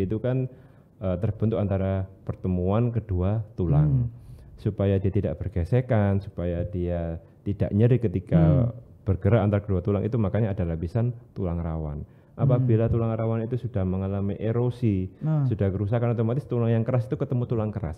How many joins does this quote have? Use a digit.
0